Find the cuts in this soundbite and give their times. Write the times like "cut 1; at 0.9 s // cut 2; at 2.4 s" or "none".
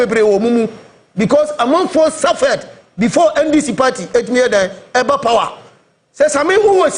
none